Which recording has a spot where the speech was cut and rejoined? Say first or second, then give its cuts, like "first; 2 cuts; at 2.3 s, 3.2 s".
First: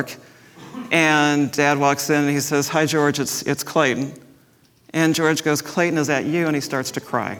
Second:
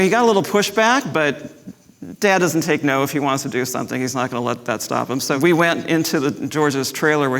second; 1 cut; at 5.4 s